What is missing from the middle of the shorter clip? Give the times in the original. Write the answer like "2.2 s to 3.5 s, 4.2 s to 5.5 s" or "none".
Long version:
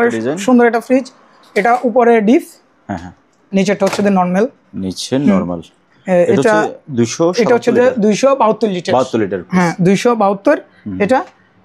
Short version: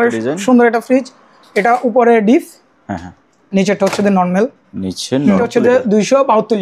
5.5 s to 7.6 s